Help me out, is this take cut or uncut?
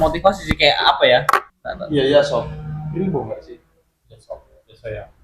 cut